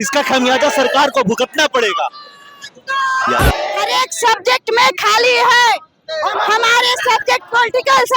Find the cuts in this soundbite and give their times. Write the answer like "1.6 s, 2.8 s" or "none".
3.8 s